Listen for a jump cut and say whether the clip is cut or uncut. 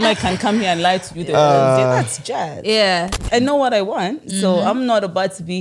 cut